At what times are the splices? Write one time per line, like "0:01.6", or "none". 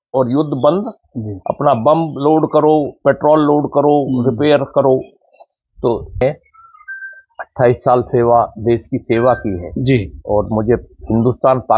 0:06.2

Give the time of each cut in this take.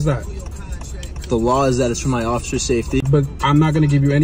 0:03.1

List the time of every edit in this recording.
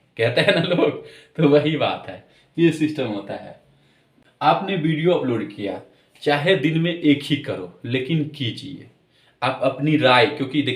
0:04.1

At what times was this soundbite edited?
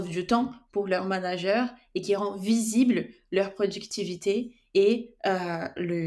none

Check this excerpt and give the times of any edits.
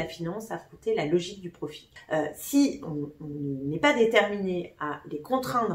0:01.9

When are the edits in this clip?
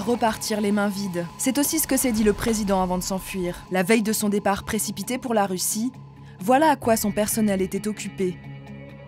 0:01.3
0:03.6

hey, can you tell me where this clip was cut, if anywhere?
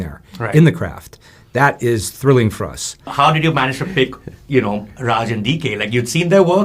0:03.1

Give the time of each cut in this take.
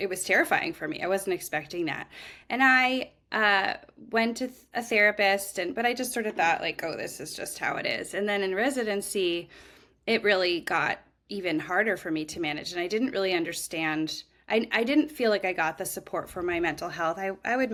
none

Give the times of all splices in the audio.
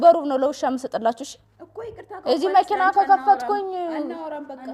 none

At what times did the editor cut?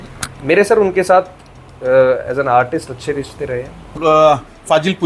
0:03.9

